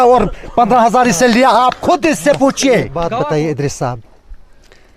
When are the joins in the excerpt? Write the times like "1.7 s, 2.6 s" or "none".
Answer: 3.0 s